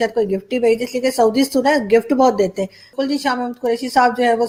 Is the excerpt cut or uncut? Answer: uncut